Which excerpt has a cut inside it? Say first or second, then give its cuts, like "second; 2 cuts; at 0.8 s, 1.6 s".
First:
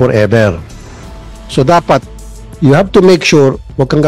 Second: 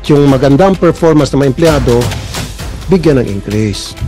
first; 1 cut; at 1.5 s